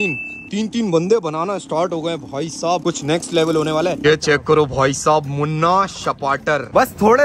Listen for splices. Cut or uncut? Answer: cut